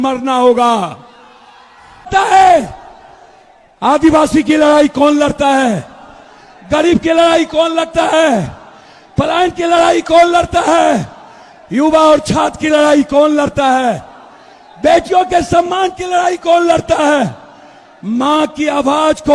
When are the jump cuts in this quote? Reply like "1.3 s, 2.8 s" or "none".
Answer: 2.1 s